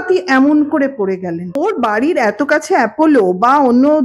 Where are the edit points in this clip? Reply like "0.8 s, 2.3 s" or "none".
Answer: 1.6 s